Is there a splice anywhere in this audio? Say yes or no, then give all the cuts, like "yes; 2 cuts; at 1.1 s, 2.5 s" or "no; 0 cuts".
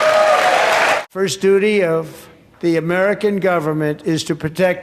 yes; 1 cut; at 1.0 s